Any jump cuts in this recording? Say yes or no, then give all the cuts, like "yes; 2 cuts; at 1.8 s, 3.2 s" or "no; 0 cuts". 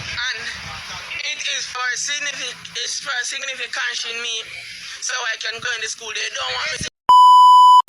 yes; 1 cut; at 6.9 s